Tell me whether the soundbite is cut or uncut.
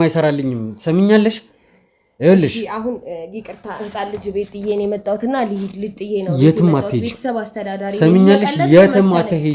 uncut